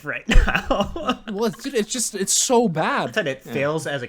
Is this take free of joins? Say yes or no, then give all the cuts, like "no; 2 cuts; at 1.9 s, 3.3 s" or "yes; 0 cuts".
no; 1 cut; at 3.1 s